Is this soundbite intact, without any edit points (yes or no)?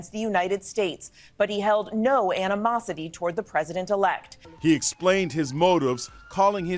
no